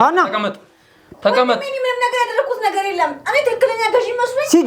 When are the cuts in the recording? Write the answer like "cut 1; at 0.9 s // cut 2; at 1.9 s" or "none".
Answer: none